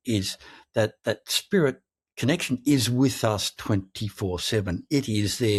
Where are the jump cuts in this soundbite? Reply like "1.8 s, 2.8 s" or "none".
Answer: none